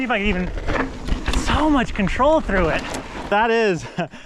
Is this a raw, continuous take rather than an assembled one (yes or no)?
no